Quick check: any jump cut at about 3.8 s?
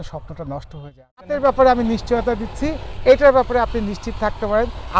no; 1 cut; at 1.3 s

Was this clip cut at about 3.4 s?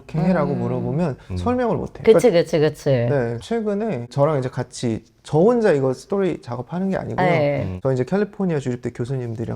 no; 2 cuts; at 1.9 s, 7.7 s

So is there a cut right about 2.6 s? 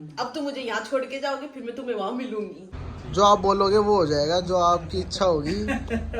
yes; 1 cut; at 2.6 s

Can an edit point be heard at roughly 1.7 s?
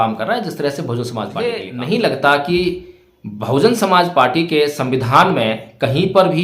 yes; 1 cut; at 1.7 s

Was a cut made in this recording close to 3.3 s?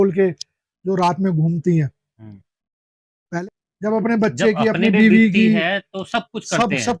yes; 1 cut; at 3.3 s

